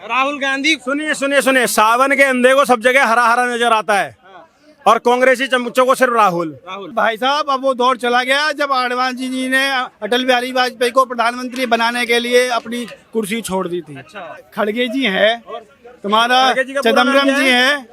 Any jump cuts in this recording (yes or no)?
yes